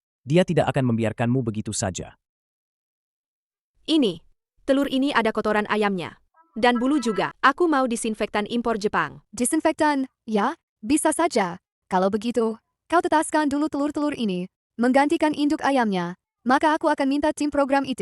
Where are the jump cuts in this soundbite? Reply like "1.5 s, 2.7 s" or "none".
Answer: 7.3 s, 9.2 s